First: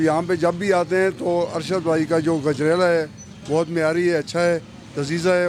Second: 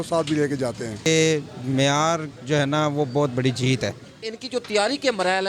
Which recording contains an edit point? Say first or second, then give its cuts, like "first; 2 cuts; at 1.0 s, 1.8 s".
second; 2 cuts; at 1.0 s, 4.4 s